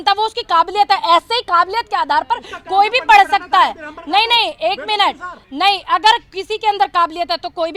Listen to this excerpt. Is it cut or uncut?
uncut